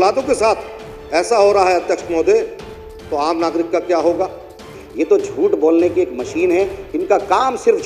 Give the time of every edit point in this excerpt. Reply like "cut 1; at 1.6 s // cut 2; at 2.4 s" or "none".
cut 1; at 4.8 s